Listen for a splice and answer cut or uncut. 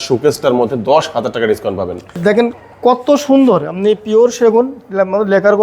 cut